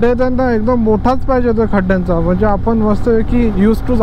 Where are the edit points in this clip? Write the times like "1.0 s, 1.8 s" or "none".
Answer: none